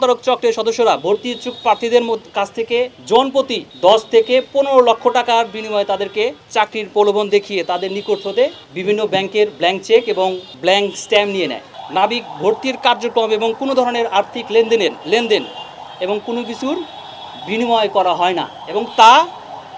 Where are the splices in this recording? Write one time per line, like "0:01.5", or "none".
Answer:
0:03.0
0:03.6
0:06.4
0:08.7
0:10.5
0:11.7